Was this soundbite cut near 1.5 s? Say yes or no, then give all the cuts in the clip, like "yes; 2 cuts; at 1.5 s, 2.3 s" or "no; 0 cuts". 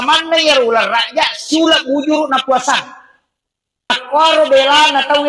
no; 1 cut; at 3.9 s